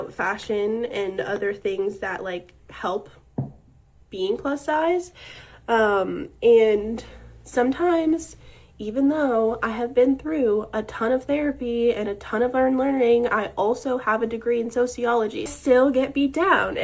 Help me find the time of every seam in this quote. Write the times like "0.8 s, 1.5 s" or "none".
7.0 s, 12.8 s